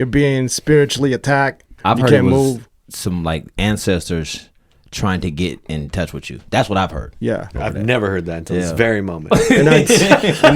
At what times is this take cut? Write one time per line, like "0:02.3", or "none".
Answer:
0:01.6